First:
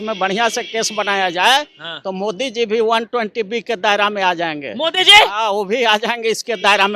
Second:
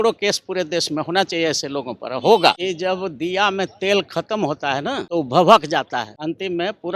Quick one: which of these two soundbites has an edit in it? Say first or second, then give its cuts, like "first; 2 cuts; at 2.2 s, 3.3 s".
second; 3 cuts; at 2.6 s, 5.0 s, 6.1 s